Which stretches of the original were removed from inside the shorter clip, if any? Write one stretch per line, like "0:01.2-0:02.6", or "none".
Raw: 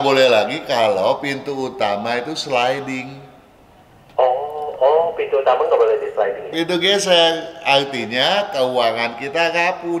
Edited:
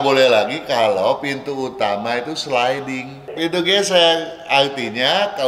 0:03.3-0:06.4